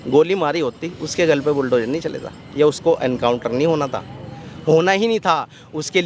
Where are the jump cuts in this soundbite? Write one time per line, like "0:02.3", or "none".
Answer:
none